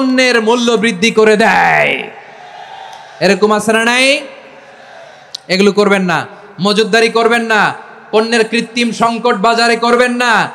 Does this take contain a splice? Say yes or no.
no